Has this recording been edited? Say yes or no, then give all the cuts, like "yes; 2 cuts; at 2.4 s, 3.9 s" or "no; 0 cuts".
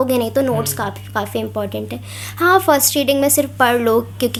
no; 0 cuts